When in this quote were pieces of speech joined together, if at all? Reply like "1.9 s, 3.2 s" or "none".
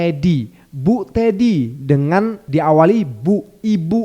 2.4 s